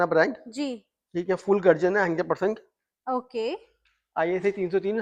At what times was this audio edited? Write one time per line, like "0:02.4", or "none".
none